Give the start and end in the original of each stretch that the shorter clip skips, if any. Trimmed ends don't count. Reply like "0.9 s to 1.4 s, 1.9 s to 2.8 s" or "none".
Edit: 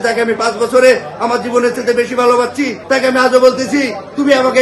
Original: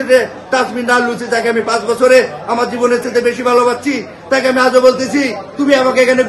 4.0 s to 4.2 s

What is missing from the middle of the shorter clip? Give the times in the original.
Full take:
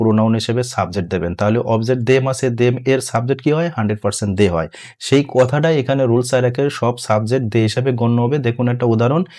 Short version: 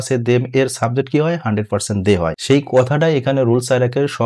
4.7 s to 5.0 s

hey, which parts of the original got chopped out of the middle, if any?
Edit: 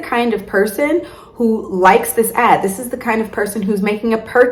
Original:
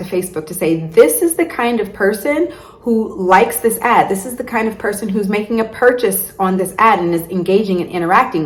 none

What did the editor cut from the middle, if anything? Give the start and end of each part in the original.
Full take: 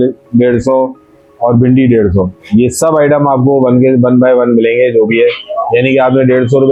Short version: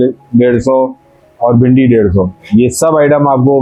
none

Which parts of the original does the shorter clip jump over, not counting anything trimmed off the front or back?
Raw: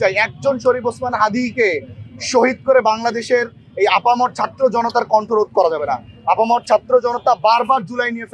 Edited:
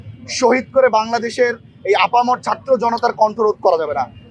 none

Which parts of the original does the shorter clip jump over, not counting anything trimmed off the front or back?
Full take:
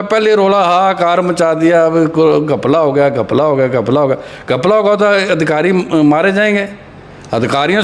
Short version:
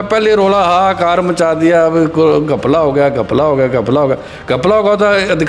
none

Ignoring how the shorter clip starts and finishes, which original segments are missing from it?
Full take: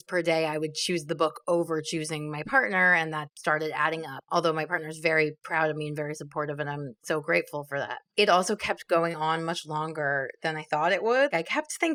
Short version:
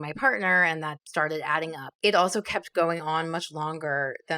4.2 s to 8.0 s

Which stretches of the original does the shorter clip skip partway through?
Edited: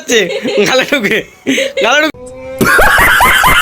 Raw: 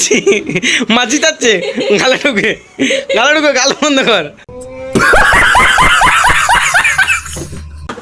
3.4 s to 4.4 s

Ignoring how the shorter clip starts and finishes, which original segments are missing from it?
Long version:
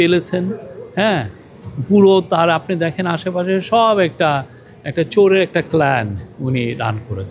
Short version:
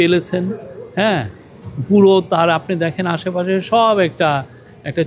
none

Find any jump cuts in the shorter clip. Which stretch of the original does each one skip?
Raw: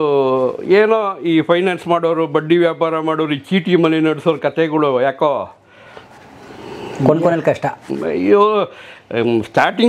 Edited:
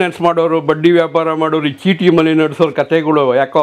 none

